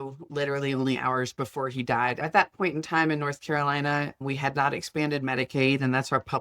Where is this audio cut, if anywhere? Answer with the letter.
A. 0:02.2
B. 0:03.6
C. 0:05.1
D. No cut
A